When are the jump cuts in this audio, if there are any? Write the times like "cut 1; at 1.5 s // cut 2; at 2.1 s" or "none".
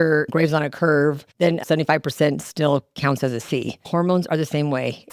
cut 1; at 1.6 s // cut 2; at 3.7 s